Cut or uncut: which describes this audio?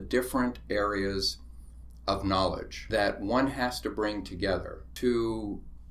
cut